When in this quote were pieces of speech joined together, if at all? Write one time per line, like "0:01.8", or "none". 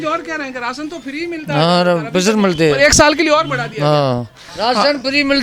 0:04.5